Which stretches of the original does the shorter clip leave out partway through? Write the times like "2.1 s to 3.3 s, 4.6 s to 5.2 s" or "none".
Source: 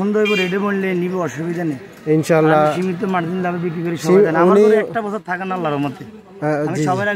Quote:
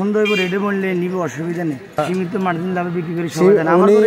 2.0 s to 2.7 s

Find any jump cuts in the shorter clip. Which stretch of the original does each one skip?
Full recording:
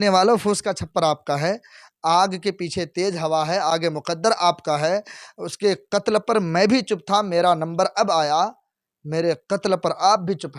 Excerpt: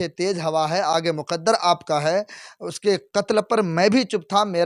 none

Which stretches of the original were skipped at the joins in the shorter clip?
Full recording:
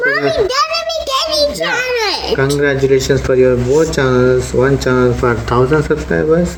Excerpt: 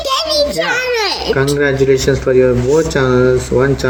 none

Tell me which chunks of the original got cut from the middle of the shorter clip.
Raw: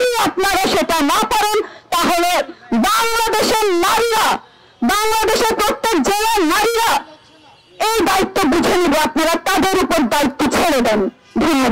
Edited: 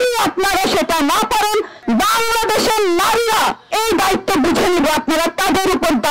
1.7 s to 2.6 s, 4.5 s to 7.7 s

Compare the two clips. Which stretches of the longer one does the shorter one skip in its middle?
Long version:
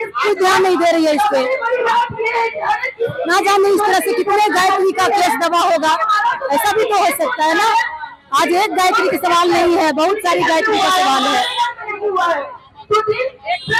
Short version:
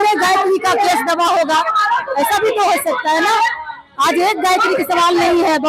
none

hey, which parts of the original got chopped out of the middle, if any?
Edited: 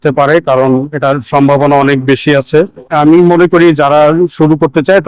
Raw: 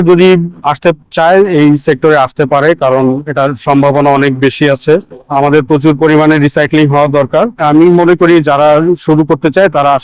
5.2 s to 7.5 s

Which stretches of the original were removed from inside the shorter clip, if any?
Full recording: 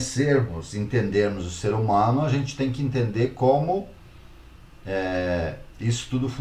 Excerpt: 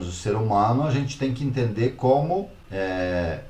4.0 s to 4.7 s

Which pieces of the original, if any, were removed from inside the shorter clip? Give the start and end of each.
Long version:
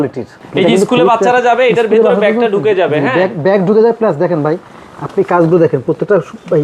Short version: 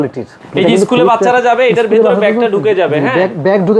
none

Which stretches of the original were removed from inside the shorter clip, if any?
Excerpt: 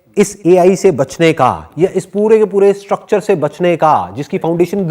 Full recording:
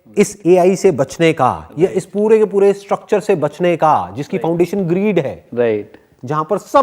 none

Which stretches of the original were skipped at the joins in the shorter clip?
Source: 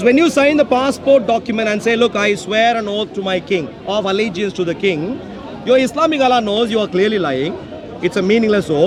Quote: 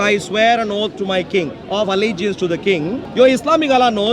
5.2 s to 5.5 s

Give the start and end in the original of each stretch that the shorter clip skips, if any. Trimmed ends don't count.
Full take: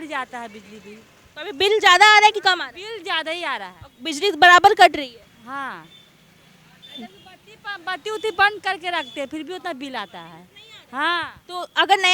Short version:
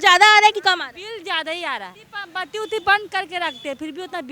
3.8 s to 7.5 s

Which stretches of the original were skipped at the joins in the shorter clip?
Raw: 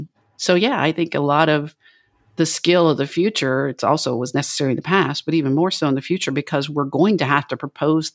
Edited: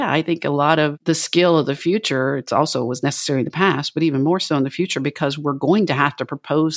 1.7 s to 2.3 s

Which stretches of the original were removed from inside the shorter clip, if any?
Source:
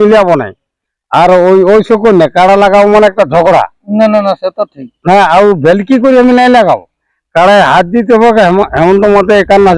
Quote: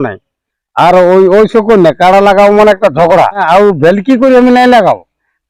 3.8 s to 5.3 s

